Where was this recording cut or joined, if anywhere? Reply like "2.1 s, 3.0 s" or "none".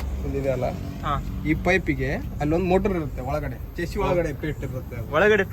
none

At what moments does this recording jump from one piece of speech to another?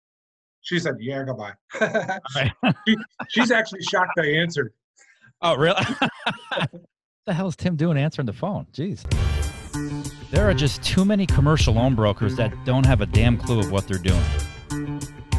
9.0 s

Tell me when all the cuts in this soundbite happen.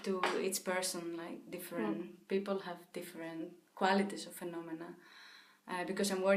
none

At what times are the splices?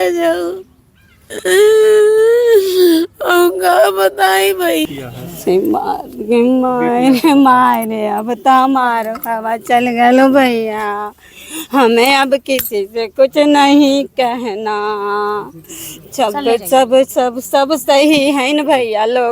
4.8 s

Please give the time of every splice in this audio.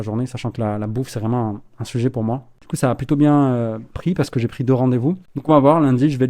2.5 s, 5.3 s

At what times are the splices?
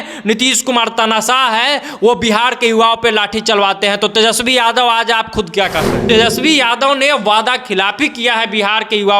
6.0 s

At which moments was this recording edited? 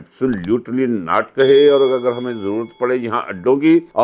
none

